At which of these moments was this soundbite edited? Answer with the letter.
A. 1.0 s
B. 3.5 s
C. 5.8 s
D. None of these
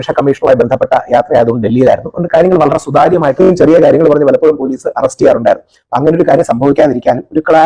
B